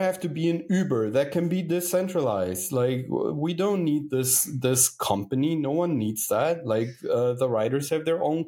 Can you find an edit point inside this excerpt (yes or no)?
no